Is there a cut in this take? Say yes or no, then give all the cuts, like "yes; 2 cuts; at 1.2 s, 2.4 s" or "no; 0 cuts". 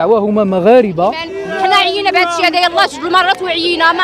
yes; 1 cut; at 1.3 s